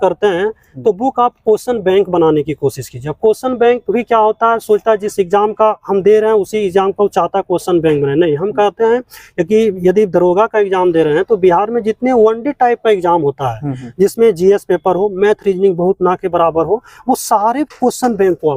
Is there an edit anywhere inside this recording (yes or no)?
no